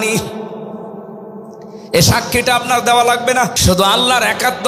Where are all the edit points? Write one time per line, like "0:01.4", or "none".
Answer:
0:03.6